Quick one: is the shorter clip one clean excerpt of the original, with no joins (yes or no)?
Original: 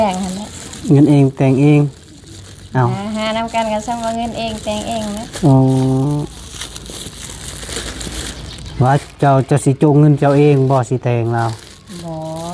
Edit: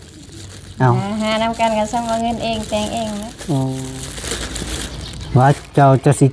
no